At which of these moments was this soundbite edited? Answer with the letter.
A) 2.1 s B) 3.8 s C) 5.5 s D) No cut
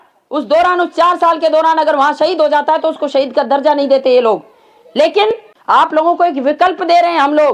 C